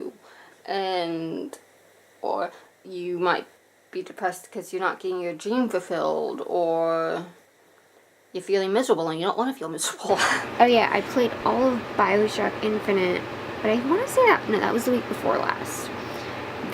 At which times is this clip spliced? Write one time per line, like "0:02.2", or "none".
0:10.4